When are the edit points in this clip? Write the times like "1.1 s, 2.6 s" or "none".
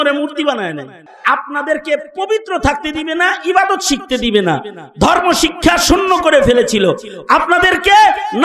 1.1 s